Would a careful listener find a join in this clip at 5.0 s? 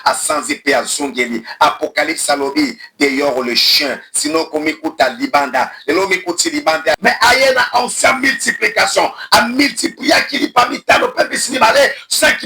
no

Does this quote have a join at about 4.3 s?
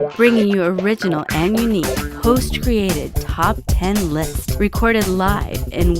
yes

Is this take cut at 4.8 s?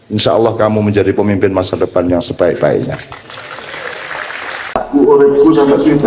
yes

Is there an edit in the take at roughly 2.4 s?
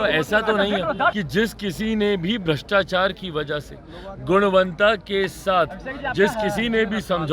no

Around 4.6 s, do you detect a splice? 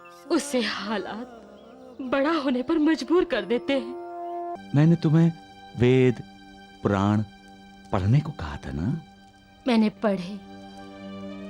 yes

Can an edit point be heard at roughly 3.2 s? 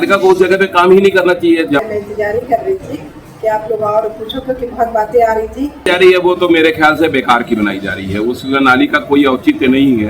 no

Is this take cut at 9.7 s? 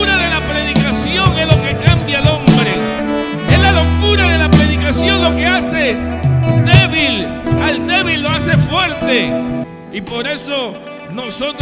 yes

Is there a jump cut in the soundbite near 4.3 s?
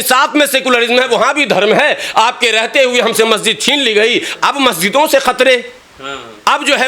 yes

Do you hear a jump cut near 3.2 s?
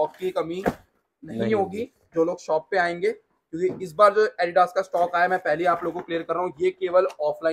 no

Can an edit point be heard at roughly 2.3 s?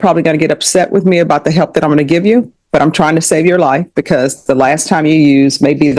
no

